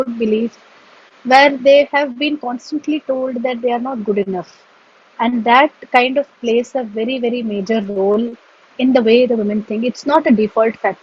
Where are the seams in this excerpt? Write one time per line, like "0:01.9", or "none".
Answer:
none